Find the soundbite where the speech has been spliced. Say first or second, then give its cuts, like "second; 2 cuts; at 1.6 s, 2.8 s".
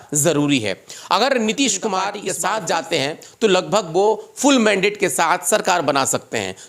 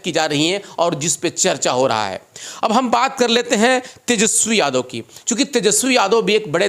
first; 1 cut; at 2.3 s